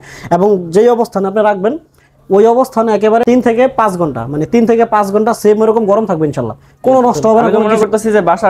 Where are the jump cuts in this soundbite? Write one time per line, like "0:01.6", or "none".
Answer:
0:03.2
0:07.6

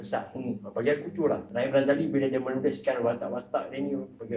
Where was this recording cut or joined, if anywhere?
0:01.5

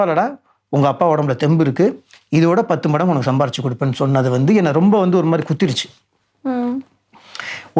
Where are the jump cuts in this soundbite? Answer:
none

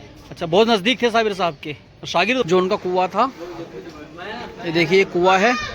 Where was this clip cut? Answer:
0:02.4

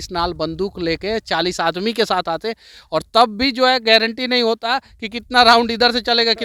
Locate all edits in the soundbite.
none

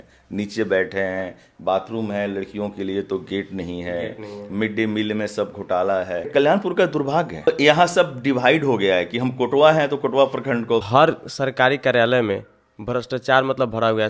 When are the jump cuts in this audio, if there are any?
0:06.3
0:07.5
0:10.9

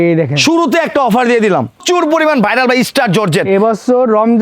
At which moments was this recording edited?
0:01.8

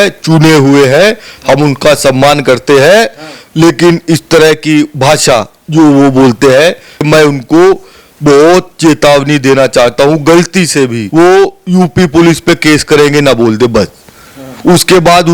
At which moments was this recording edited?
0:07.0
0:11.0

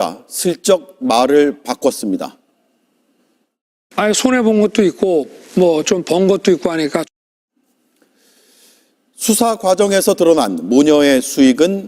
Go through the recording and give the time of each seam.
none

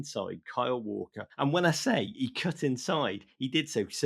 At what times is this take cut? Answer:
0:01.2

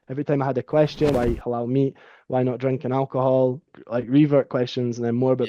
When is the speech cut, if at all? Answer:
0:01.1
0:03.7

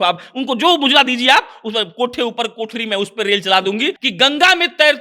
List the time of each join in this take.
0:04.0

